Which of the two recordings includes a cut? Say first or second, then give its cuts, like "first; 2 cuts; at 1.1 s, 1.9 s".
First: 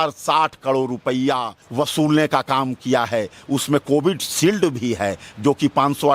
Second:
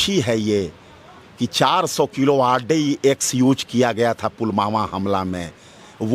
first; 1 cut; at 1.6 s